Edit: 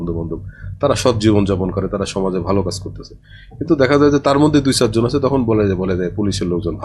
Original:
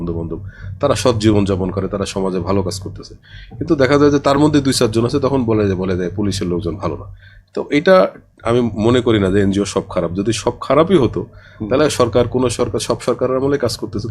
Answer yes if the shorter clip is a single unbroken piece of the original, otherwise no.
yes